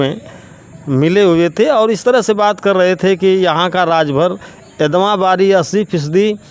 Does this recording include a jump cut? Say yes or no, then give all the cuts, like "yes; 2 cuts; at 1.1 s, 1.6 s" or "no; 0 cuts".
no; 0 cuts